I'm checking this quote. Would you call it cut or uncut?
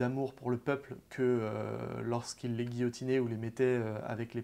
uncut